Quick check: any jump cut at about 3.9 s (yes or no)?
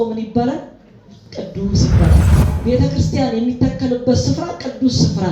no